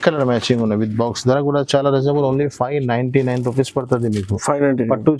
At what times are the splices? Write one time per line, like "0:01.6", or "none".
none